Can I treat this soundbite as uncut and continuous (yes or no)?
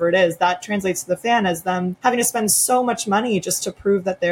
no